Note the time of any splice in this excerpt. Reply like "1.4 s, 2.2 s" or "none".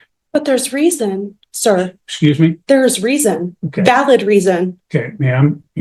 none